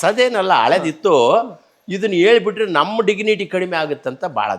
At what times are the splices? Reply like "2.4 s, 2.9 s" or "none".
none